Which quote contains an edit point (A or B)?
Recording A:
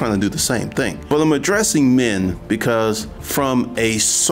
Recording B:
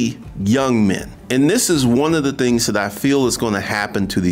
A